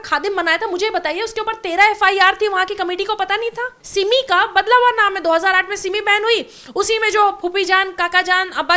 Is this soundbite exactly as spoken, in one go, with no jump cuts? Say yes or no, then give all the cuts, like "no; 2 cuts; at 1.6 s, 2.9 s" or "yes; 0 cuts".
no; 1 cut; at 3.8 s